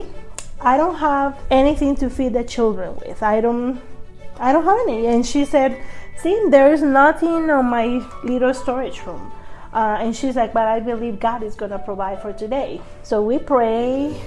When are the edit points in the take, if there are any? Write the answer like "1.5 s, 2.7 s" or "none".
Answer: 1.4 s